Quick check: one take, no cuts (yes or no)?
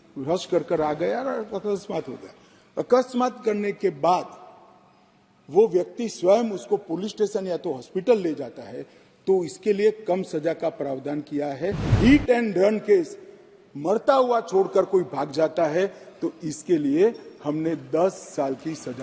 no